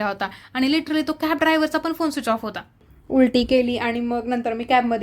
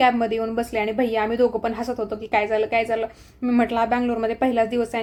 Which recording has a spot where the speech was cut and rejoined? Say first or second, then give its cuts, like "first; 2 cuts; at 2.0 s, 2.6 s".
first; 1 cut; at 2.8 s